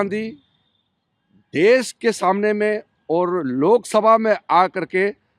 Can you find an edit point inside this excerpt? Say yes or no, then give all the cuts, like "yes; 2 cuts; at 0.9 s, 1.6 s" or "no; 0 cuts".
no; 0 cuts